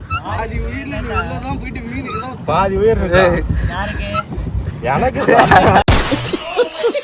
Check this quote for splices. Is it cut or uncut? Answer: uncut